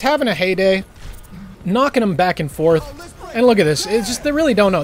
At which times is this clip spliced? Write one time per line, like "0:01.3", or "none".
0:03.2